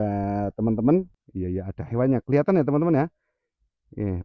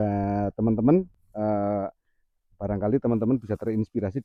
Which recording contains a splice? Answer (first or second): first